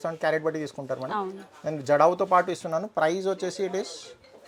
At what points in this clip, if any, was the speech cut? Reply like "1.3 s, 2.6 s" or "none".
none

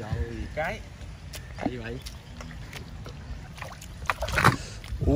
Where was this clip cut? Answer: 3.4 s

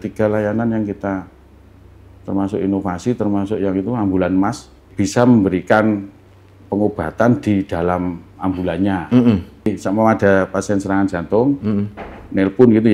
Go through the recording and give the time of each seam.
4.9 s, 9.7 s

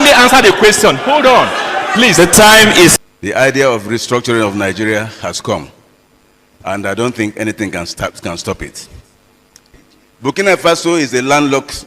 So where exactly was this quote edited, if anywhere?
2.9 s, 9.7 s

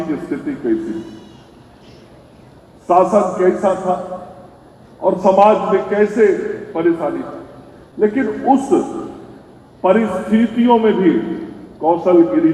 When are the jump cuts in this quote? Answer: none

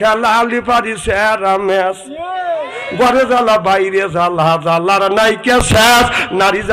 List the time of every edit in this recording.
none

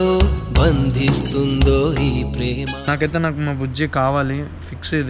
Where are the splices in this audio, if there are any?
2.8 s

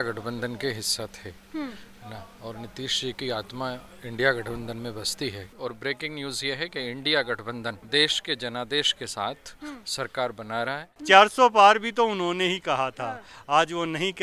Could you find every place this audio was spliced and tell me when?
5.5 s, 7.8 s, 10.9 s

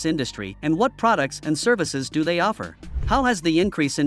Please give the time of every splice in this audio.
2.8 s

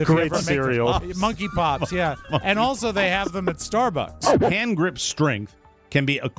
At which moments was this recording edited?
4.4 s

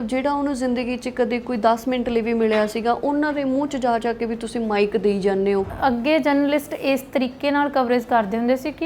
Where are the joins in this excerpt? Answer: 5.7 s

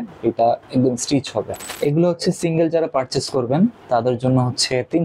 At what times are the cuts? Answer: 1.6 s

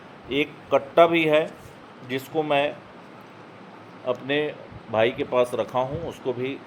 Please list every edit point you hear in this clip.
none

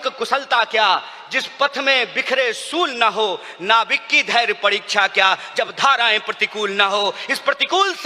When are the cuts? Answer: none

